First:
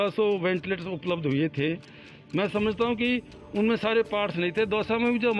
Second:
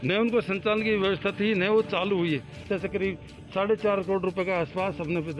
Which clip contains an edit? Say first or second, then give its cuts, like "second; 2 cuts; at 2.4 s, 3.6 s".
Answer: second; 1 cut; at 2.6 s